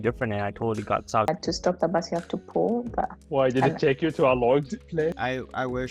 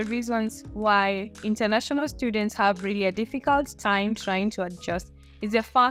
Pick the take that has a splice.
first; 2 cuts; at 1.3 s, 5.1 s

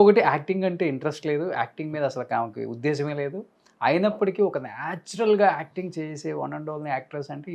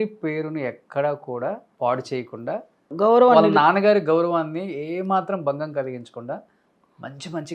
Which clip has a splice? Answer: second; 2 cuts; at 1.7 s, 2.9 s

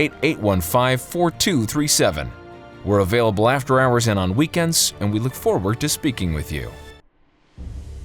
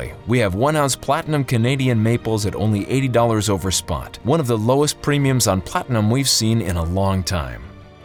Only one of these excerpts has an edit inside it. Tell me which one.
first; 1 cut; at 6.7 s

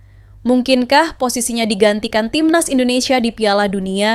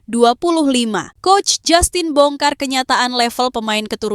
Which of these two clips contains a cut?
second; 1 cut; at 1.1 s

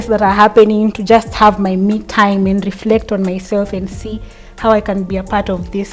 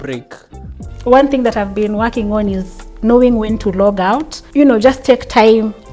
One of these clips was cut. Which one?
second; 2 cuts; at 0.9 s, 4.3 s

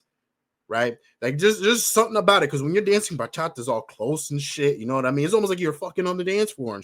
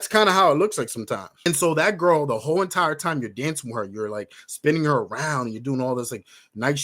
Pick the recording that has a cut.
second; 1 cut; at 1.3 s

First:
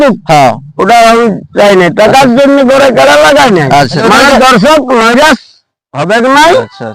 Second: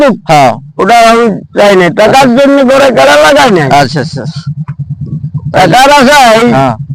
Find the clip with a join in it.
first; 1 cut; at 4.0 s

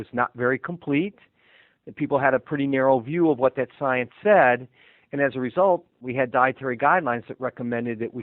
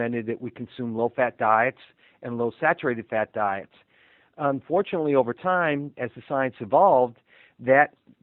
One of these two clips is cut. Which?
first; 1 cut; at 6.0 s

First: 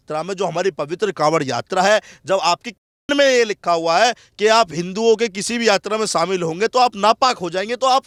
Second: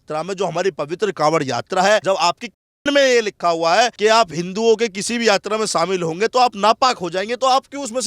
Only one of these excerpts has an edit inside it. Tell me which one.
second; 2 cuts; at 2.0 s, 3.9 s

